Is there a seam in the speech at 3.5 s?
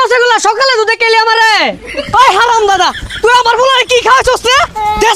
no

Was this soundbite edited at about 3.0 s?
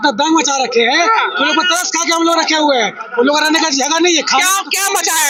no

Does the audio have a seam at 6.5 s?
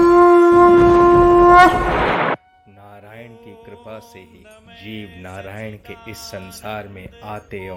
no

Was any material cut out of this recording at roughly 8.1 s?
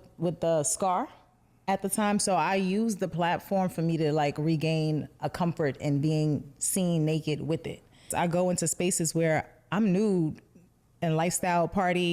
yes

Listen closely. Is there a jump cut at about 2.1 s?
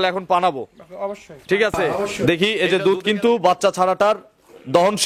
yes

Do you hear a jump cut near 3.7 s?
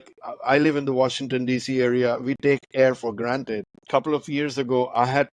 yes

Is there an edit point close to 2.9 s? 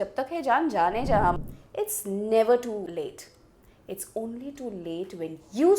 yes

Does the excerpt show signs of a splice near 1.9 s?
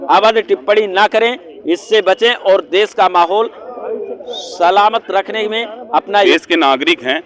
no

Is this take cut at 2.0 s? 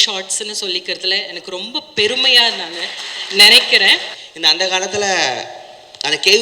no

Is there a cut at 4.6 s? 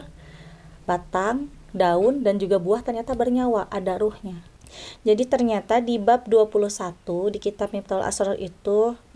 yes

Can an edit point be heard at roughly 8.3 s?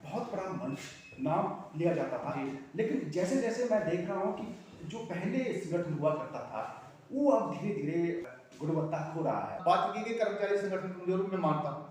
yes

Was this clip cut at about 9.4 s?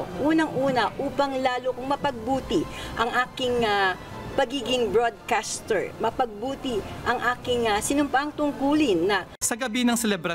yes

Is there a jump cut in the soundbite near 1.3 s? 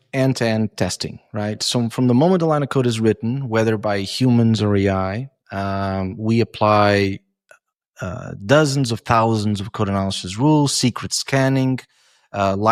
no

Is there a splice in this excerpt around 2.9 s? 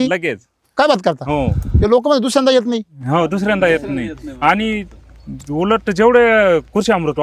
no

